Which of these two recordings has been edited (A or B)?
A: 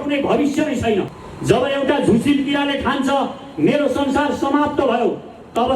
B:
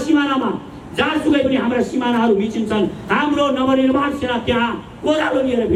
A